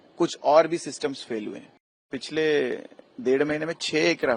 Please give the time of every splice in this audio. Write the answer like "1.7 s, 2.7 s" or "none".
2.1 s